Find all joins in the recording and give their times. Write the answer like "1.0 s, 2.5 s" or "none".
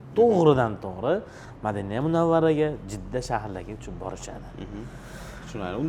none

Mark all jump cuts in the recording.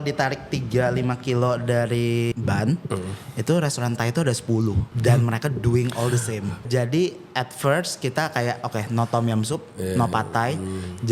2.3 s, 4.9 s, 6.6 s

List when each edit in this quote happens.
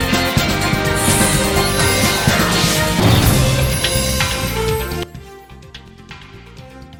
none

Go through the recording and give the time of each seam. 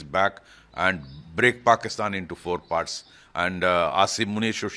none

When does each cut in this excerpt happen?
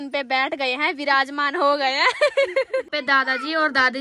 2.9 s

